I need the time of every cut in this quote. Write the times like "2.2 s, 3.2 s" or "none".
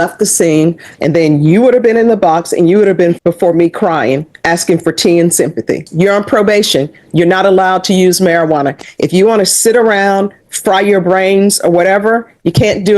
0.9 s, 3.2 s, 5.9 s